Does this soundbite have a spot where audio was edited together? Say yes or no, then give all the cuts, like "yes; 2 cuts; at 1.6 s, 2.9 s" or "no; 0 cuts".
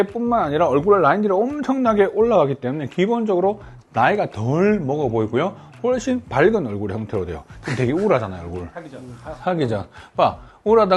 no; 0 cuts